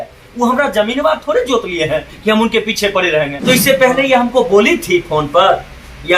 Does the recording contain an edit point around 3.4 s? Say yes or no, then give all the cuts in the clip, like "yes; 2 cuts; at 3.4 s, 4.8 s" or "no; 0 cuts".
yes; 1 cut; at 3.4 s